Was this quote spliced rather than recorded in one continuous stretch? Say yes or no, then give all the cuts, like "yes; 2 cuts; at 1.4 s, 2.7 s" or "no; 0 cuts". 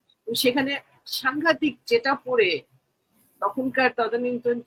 no; 0 cuts